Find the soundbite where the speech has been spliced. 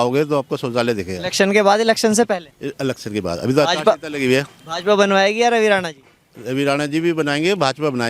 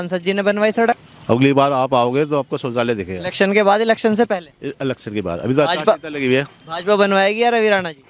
second; 1 cut; at 1.1 s

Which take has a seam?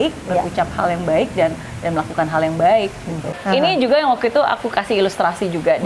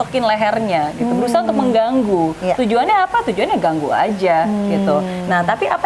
first; 1 cut; at 3.3 s

